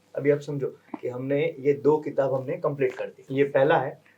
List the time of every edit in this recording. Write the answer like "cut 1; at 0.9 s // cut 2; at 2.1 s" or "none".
cut 1; at 3.1 s